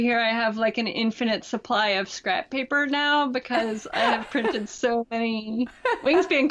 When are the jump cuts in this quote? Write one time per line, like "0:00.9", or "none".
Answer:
none